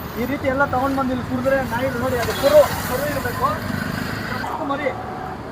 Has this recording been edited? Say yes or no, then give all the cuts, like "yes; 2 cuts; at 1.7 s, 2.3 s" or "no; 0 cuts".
yes; 1 cut; at 4.4 s